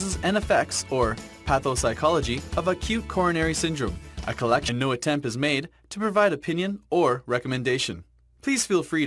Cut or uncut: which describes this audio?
uncut